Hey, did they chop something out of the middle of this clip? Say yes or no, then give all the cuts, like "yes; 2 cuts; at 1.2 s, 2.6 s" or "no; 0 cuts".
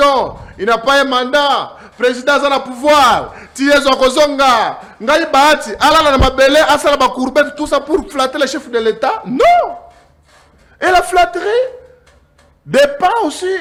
no; 0 cuts